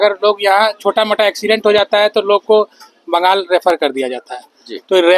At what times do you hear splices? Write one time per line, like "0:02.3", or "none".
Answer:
none